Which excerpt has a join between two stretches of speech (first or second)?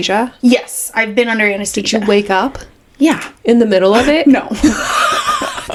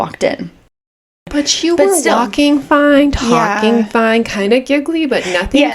second